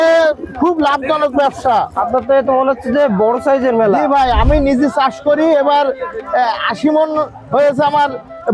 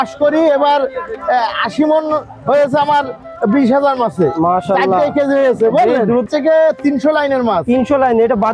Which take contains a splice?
second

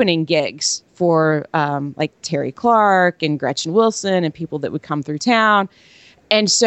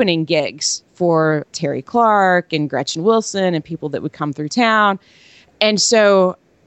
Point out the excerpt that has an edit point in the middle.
second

